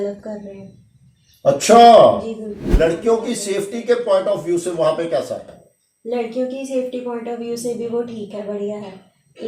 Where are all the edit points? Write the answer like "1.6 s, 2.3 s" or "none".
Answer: 2.7 s

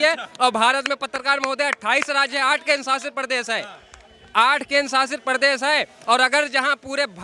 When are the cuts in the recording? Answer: none

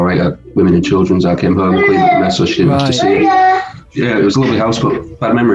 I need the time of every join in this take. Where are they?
3.9 s

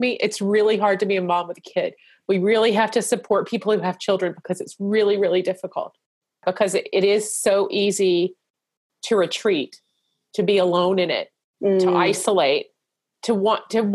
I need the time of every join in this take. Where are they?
6.4 s

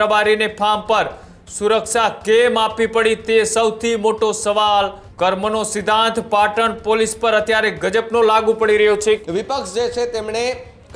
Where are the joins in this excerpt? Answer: 5.0 s, 9.2 s

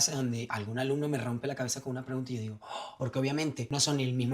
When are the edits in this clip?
2.9 s

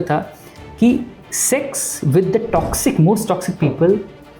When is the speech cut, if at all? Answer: none

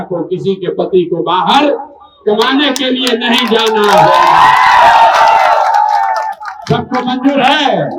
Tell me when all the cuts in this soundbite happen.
none

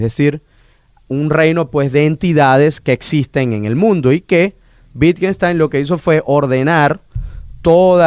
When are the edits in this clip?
none

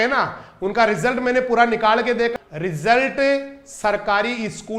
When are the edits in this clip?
2.3 s

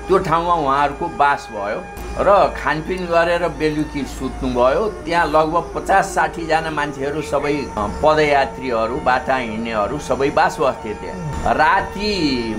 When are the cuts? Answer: 7.8 s, 11.3 s

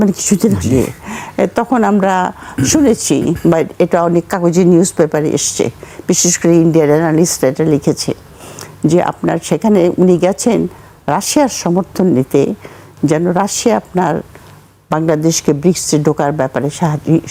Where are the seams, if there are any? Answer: none

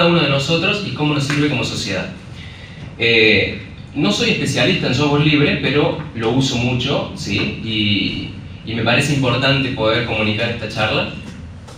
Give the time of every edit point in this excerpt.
none

